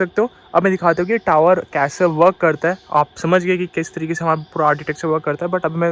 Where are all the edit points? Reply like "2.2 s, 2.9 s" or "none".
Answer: none